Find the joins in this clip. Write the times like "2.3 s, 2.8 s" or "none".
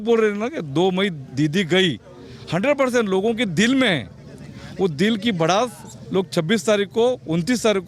none